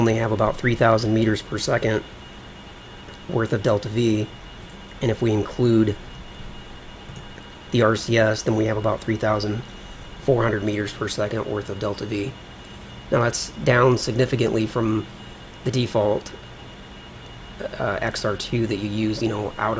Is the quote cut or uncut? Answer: cut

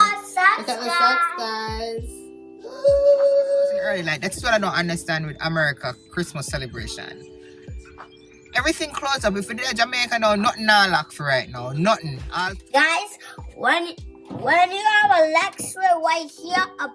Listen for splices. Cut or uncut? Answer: cut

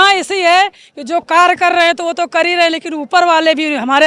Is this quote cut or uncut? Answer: uncut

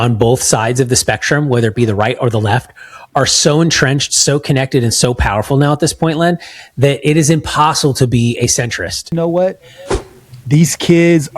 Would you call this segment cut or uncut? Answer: cut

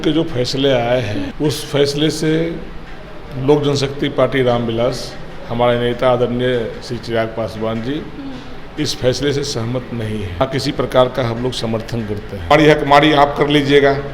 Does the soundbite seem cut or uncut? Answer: cut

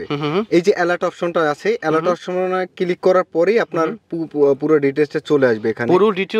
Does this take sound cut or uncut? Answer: uncut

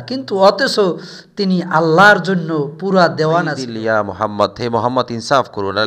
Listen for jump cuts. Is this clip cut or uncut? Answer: cut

